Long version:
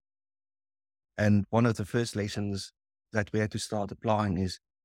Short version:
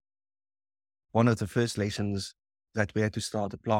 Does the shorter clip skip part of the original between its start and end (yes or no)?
yes